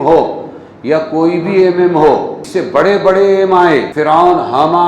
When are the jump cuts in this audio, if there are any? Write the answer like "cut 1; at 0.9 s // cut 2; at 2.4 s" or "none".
cut 1; at 2.4 s // cut 2; at 3.9 s

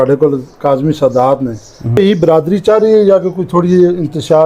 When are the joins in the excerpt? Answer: cut 1; at 2.0 s

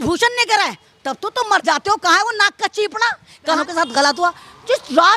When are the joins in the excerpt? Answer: cut 1; at 3.6 s

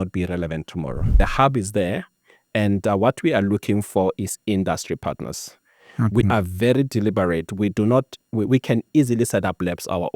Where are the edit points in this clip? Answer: cut 1; at 1.2 s

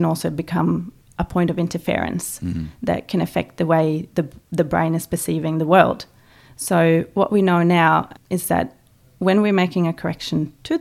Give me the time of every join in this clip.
cut 1; at 1.0 s // cut 2; at 8.1 s

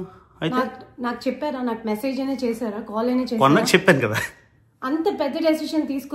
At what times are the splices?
none

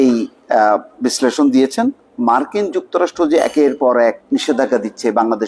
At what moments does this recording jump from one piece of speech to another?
cut 1; at 2.1 s // cut 2; at 4.2 s

